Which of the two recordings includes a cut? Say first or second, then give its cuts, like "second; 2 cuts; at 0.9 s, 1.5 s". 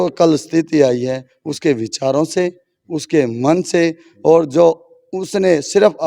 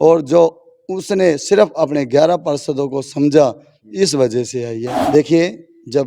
second; 1 cut; at 5.0 s